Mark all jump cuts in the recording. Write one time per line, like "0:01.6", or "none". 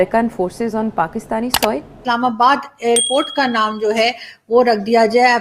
0:02.0

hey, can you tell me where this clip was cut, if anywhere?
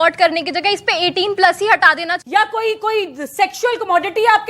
0:02.2

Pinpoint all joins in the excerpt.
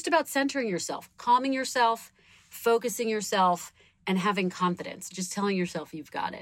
none

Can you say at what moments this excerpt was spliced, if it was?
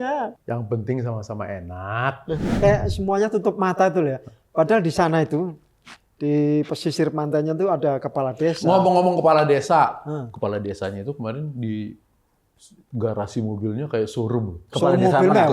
0:02.5

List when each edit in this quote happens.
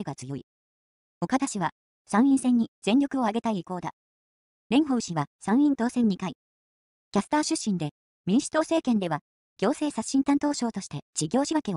0:10.1

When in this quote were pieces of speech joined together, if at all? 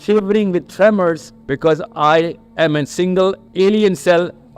0:01.3
0:02.4
0:03.4

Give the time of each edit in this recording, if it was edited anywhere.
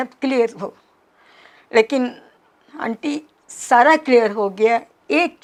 none

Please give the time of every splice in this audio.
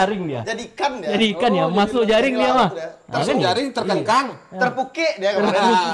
none

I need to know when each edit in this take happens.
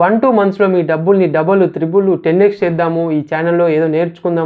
none

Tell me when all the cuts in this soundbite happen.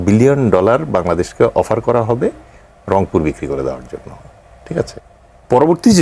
0:05.0

